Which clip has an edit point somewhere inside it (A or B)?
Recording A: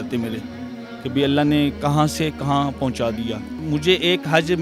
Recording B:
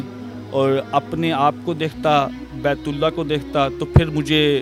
A